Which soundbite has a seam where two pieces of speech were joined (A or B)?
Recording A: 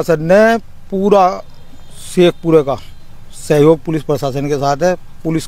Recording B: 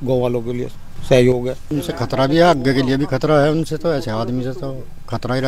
B